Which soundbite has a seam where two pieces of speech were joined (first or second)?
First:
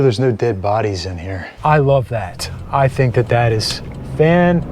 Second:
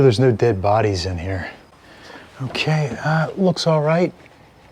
first